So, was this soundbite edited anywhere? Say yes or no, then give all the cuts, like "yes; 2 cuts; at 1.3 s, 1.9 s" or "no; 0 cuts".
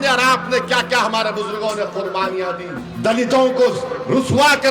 yes; 1 cut; at 2.8 s